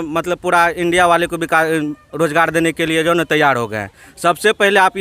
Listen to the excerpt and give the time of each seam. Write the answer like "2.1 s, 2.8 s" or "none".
none